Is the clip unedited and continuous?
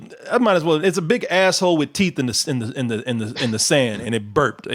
yes; 0 cuts

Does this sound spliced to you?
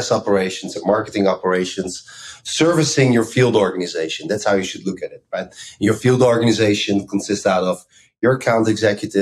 no; 0 cuts

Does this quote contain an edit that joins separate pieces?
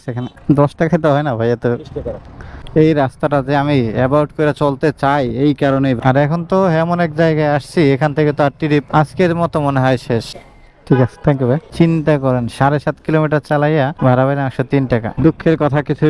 yes; 5 cuts; at 2.6 s, 6.0 s, 10.3 s, 11.7 s, 15.2 s

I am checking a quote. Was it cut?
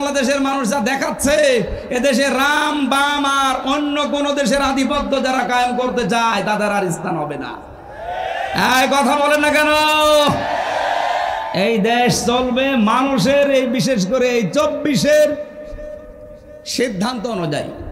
no; 0 cuts

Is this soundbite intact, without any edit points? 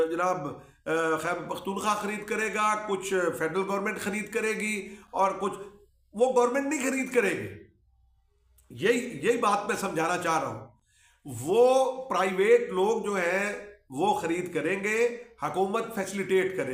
yes; 0 cuts

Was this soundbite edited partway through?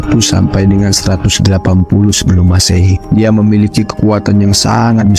yes; 1 cut; at 3.0 s

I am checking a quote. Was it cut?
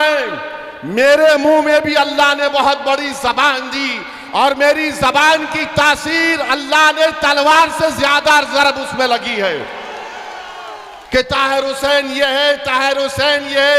no; 0 cuts

